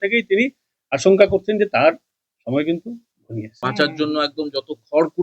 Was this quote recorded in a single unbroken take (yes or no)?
no